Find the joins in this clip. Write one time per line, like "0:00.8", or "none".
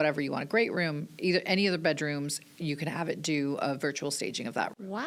none